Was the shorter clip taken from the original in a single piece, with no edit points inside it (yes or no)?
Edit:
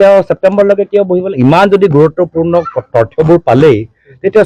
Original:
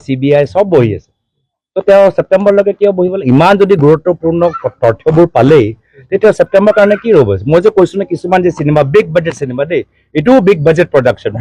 yes